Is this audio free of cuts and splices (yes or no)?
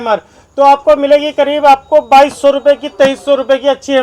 yes